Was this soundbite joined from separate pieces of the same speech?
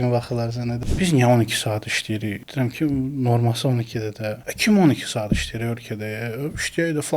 yes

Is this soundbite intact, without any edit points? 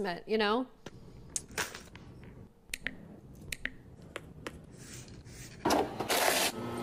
yes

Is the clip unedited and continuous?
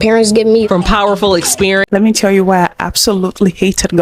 no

